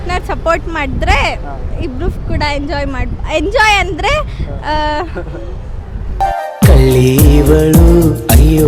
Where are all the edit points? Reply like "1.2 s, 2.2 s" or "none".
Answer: 6.0 s